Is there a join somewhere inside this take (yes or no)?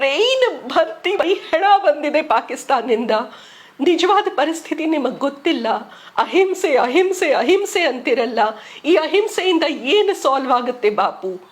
yes